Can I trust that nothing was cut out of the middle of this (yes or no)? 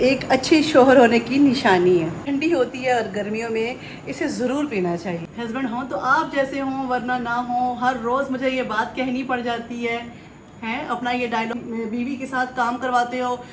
no